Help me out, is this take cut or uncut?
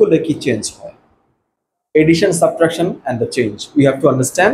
uncut